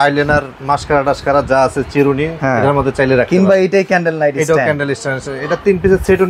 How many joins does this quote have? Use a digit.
1